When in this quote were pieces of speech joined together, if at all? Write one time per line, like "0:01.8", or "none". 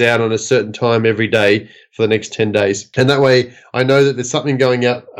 0:02.8

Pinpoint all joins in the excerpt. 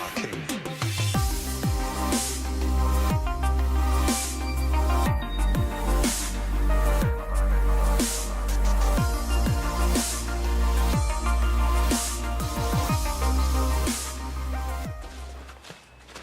0:09.5

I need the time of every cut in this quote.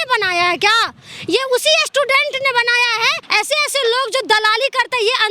0:03.2

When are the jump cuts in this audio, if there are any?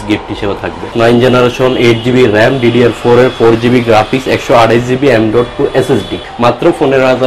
0:00.9
0:06.3

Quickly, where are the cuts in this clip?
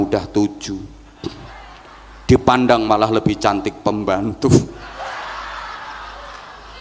none

